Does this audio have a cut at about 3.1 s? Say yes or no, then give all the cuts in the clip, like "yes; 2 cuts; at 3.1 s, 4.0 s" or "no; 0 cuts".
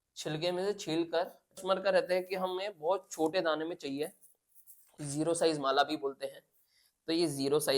no; 1 cut; at 1.6 s